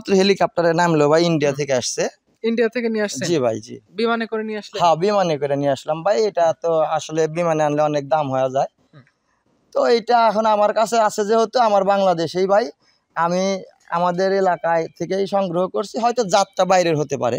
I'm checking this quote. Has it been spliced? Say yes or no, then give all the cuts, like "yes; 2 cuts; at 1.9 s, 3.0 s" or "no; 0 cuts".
no; 0 cuts